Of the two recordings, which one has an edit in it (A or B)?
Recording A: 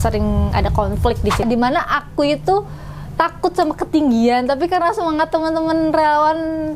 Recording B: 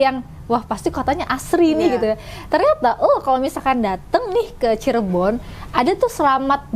A